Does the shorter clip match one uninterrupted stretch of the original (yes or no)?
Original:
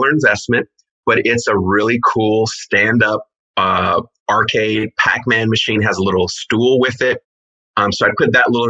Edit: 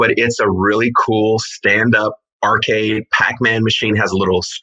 no